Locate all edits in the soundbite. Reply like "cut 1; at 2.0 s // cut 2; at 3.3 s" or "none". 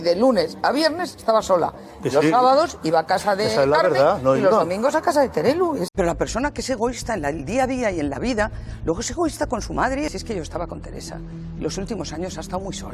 cut 1; at 5.8 s // cut 2; at 10.0 s